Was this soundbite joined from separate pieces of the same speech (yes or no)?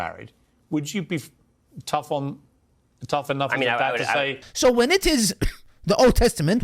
yes